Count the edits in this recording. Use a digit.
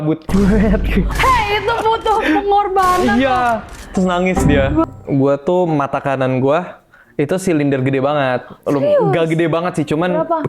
1